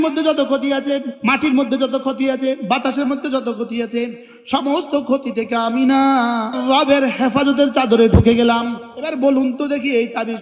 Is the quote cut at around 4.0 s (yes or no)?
no